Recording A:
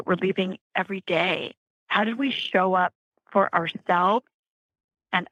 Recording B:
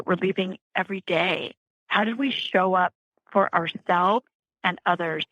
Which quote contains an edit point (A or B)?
B